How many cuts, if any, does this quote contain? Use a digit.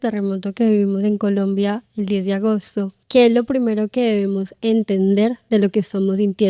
2